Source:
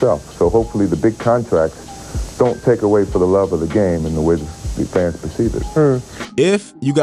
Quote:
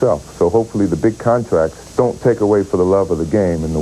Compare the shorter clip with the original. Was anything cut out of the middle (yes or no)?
yes